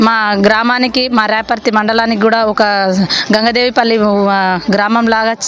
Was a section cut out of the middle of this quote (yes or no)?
no